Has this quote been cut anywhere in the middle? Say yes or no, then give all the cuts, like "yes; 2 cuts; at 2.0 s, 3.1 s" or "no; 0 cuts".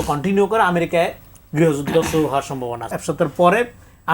yes; 1 cut; at 2.8 s